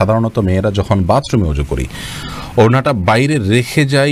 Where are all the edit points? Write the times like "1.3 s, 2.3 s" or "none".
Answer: none